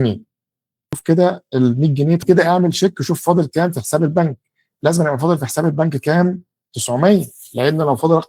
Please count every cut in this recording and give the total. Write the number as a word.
two